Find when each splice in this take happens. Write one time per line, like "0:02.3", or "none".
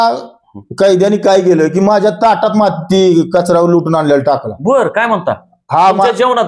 none